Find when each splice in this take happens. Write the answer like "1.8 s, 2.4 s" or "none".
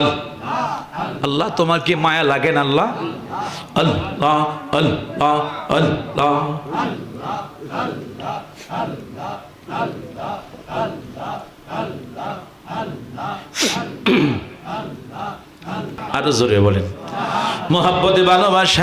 16.0 s